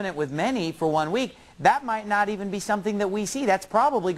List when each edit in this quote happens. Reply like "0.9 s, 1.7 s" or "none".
none